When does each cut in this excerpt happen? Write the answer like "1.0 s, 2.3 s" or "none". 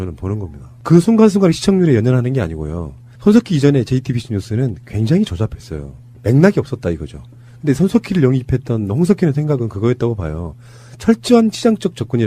5.7 s